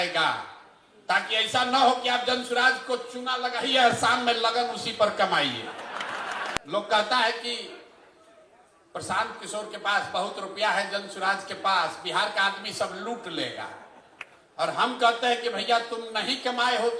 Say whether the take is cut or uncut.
cut